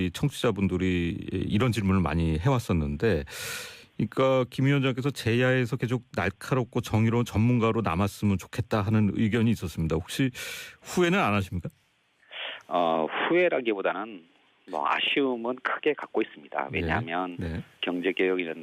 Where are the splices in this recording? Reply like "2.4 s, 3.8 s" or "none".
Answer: 9.0 s